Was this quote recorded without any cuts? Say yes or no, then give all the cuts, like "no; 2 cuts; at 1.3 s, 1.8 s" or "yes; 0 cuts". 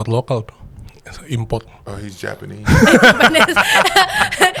yes; 0 cuts